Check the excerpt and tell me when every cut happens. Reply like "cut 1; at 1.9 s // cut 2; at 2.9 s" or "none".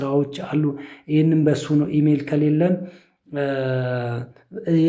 none